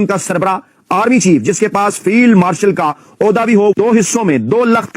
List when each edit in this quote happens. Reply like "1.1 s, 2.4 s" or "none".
3.7 s